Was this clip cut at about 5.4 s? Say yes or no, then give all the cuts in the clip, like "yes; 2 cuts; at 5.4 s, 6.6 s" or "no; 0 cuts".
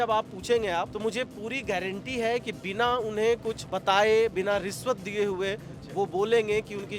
no; 2 cuts; at 0.9 s, 3.7 s